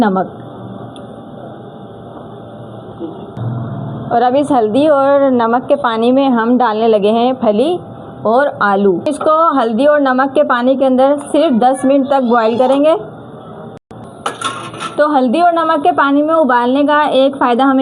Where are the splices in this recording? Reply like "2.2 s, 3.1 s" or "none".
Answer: 3.3 s, 9.4 s